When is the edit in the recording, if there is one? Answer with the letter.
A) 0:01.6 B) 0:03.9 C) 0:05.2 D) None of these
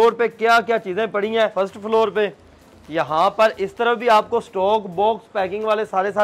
A